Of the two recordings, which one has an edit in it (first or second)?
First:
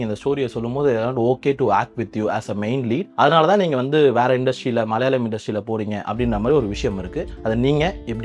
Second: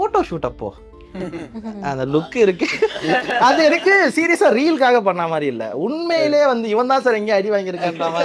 first